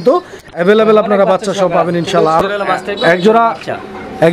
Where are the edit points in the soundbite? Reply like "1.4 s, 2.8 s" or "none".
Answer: 2.4 s

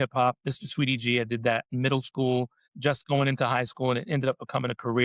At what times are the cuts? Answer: 2.6 s

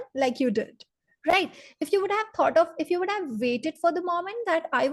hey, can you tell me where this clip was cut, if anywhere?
none

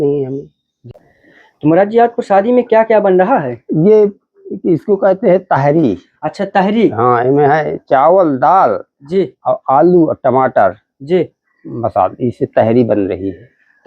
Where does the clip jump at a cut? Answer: 0.9 s

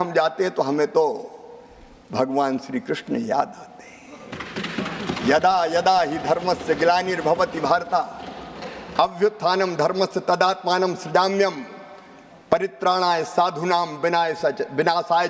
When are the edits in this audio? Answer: none

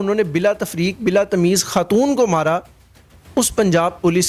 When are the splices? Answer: none

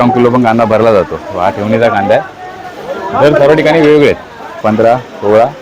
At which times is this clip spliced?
4.6 s

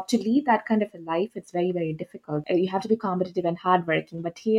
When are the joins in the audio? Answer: 2.4 s

